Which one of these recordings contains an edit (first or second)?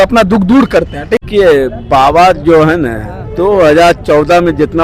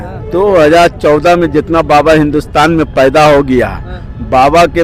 first